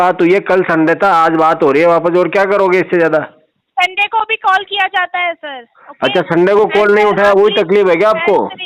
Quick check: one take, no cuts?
yes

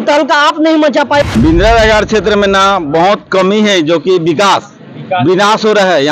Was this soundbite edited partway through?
yes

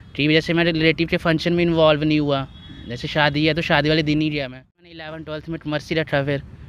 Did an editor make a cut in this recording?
yes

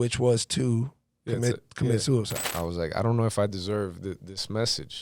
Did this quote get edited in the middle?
yes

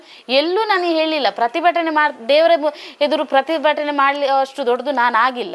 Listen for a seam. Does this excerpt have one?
no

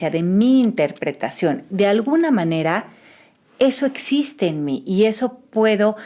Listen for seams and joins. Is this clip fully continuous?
yes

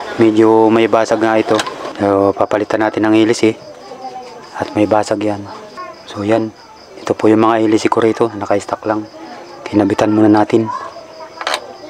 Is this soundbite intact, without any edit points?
yes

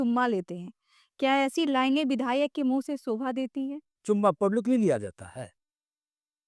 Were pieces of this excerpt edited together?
yes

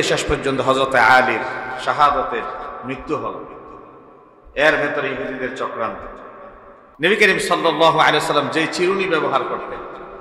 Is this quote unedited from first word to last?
no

